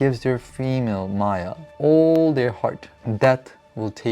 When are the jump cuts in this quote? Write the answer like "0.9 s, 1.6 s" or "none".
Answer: 1.6 s, 2.9 s